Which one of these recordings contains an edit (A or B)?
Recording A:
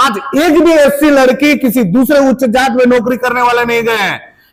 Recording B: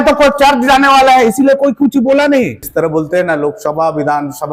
B